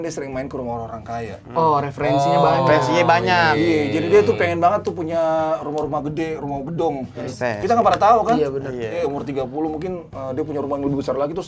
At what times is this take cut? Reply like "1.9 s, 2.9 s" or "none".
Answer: 7.2 s, 8.9 s